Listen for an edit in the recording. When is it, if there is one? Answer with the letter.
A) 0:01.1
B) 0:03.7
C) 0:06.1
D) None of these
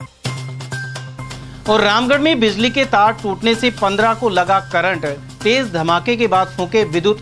A